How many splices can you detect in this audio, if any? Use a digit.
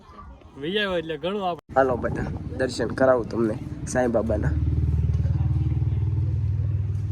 1